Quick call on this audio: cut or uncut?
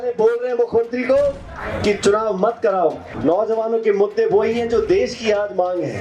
cut